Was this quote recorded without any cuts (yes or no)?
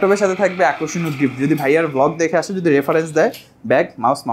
yes